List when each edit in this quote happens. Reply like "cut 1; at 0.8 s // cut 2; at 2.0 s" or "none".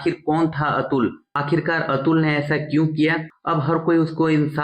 cut 1; at 3.3 s